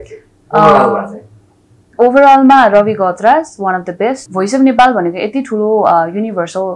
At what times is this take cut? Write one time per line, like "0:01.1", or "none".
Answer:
0:04.2